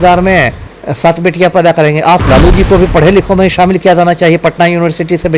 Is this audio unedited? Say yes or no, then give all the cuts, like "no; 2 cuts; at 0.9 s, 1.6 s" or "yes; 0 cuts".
no; 1 cut; at 2.2 s